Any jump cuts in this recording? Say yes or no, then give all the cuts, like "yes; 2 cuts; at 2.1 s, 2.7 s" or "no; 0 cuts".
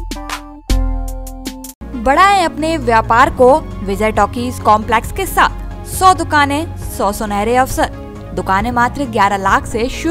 no; 0 cuts